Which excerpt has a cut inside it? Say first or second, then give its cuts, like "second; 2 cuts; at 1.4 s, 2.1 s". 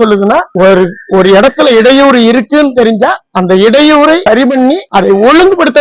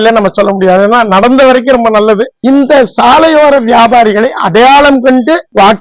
second; 1 cut; at 2.4 s